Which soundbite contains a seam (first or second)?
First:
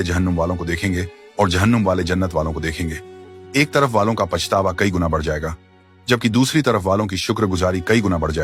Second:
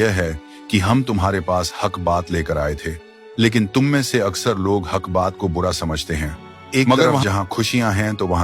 second